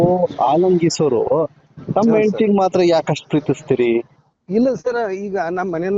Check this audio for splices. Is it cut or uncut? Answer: uncut